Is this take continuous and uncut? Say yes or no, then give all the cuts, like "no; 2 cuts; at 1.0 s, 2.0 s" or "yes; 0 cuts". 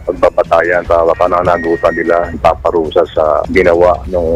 no; 2 cuts; at 0.8 s, 2.4 s